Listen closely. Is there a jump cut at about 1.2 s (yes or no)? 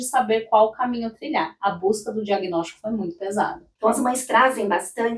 no